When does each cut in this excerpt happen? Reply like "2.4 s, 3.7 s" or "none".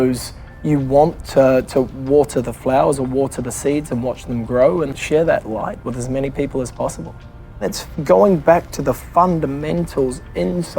4.9 s, 7.8 s